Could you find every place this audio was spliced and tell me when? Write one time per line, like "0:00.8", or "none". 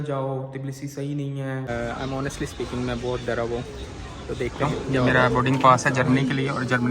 0:01.7
0:04.6